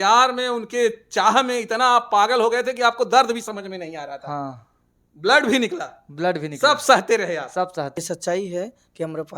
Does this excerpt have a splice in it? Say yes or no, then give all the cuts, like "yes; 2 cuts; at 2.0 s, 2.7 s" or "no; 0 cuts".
yes; 1 cut; at 7.9 s